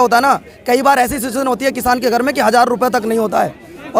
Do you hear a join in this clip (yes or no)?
no